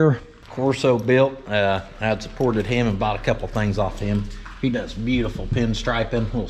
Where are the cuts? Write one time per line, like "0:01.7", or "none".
none